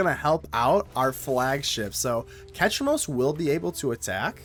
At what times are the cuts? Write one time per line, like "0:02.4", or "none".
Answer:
none